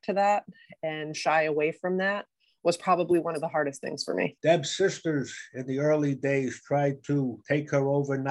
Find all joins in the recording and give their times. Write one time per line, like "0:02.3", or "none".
0:04.3